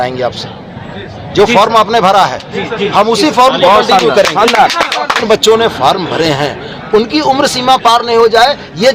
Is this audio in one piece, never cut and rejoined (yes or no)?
no